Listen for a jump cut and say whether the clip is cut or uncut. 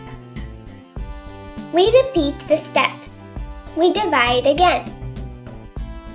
cut